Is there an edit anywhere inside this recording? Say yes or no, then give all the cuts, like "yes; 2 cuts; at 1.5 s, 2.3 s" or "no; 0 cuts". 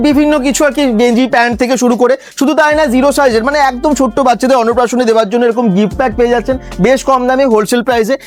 no; 0 cuts